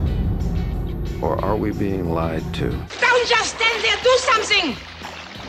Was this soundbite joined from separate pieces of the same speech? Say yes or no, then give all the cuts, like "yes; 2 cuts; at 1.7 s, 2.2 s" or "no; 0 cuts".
yes; 1 cut; at 2.9 s